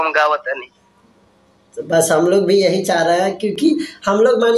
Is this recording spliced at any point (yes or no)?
no